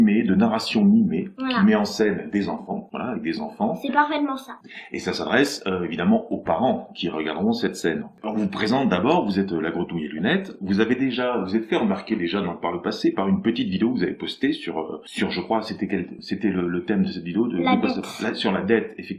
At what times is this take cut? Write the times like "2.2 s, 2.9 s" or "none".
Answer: 18.1 s